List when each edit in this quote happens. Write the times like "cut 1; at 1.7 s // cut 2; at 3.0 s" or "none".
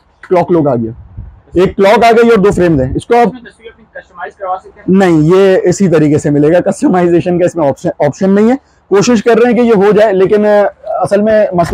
none

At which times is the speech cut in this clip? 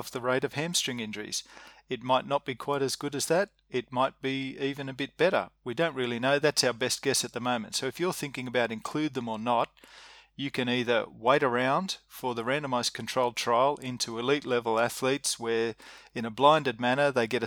none

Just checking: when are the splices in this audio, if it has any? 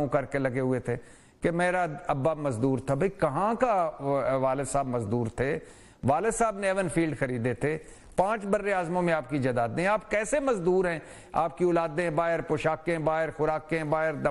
none

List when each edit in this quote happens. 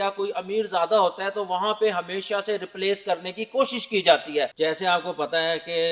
cut 1; at 4.5 s

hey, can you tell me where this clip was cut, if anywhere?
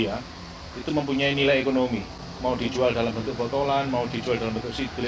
none

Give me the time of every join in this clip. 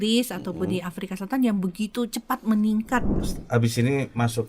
cut 1; at 3.1 s

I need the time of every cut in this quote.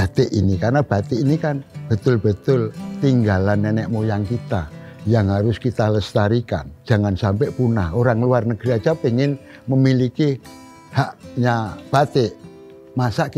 cut 1; at 6.7 s

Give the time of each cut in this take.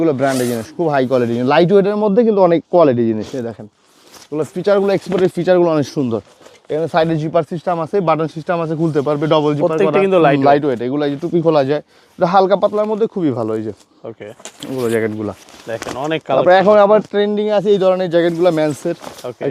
none

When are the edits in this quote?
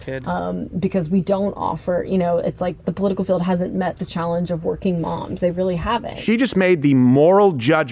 cut 1; at 6.1 s

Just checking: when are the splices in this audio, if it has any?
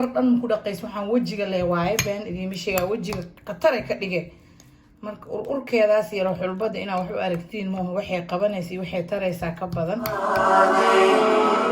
cut 1; at 10.2 s

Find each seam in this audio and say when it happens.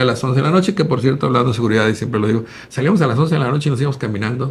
none

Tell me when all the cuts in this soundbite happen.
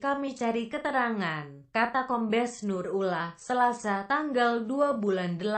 cut 1; at 2.0 s

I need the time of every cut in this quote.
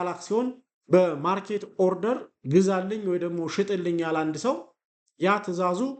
none

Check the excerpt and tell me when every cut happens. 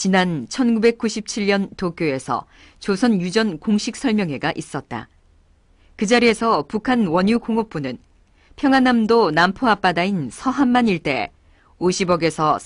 none

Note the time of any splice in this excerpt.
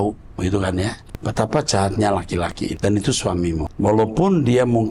cut 1; at 1.0 s // cut 2; at 2.8 s // cut 3; at 3.7 s

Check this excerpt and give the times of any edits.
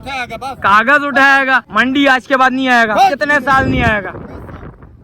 cut 1; at 1.7 s

